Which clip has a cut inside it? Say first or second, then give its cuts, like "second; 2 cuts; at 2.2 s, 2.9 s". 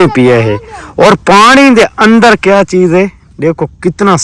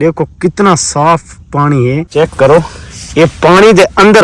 second; 1 cut; at 2.1 s